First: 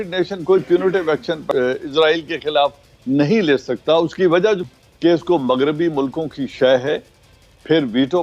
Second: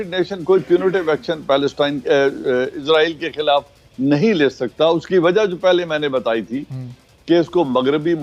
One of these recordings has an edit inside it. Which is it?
first; 2 cuts; at 1.4 s, 4.6 s

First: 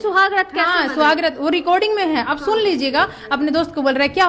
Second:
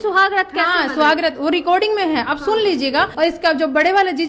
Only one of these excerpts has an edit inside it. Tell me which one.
second; 1 cut; at 3.1 s

